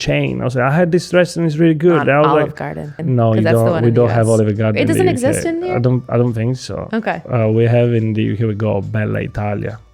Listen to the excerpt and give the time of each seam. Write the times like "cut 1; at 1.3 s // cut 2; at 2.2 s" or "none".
cut 1; at 3.0 s